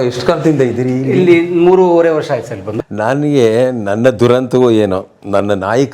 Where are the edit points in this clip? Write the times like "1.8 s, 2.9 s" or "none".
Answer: 2.8 s